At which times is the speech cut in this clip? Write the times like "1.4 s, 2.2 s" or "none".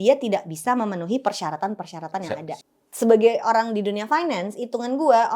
2.6 s